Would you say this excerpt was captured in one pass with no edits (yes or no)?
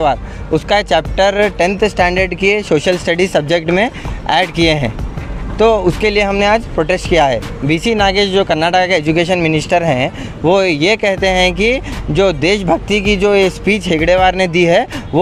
yes